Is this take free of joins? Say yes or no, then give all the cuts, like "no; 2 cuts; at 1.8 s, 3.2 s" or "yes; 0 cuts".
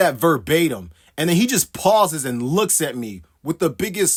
yes; 0 cuts